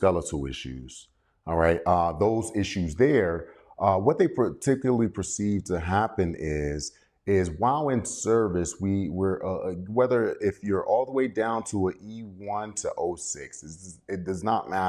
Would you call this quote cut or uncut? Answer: uncut